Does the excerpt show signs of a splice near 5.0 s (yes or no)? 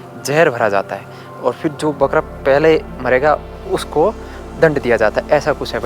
no